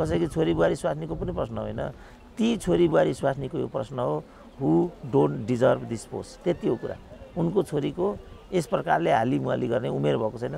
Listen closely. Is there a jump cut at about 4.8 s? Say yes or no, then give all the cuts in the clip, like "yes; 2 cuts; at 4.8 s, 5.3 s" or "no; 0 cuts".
no; 0 cuts